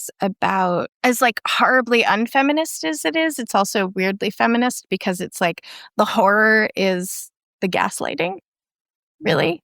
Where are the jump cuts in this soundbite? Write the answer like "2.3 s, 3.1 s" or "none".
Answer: 0.9 s